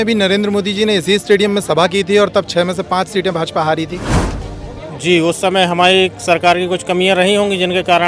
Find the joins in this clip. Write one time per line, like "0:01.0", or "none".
none